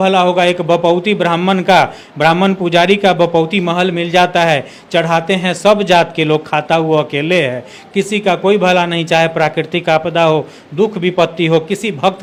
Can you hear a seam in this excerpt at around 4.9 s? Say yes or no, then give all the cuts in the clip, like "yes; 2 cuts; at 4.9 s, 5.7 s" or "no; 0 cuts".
no; 0 cuts